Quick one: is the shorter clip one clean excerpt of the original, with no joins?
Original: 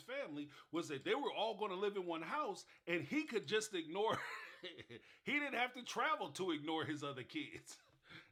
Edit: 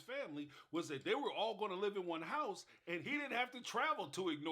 no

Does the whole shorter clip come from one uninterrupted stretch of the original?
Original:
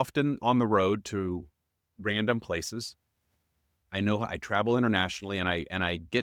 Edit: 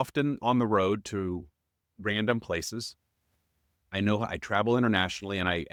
yes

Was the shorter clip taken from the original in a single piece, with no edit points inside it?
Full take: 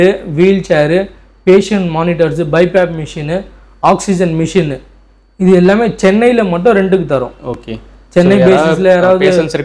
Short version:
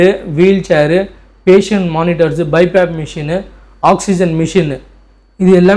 yes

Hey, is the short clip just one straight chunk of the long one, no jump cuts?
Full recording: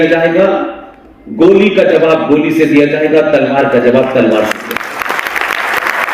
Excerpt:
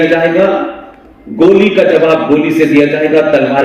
yes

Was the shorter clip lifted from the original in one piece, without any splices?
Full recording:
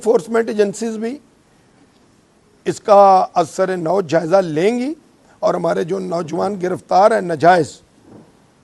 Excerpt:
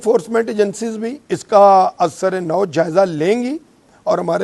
no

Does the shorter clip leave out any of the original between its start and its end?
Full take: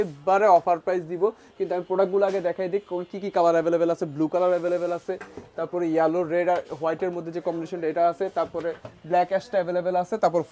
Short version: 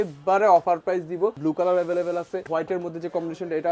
yes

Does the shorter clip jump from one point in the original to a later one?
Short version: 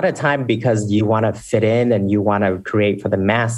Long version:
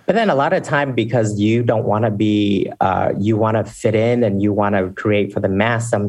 yes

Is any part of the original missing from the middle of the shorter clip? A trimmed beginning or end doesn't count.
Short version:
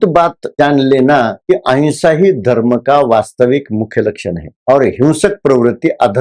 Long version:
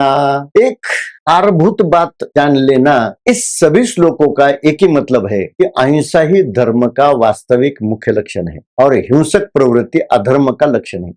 yes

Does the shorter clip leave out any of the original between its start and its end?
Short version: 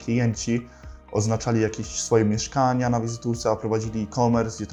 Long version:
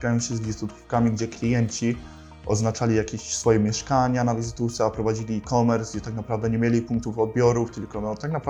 no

